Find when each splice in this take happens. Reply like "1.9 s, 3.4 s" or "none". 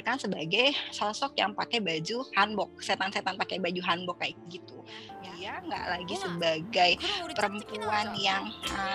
5.1 s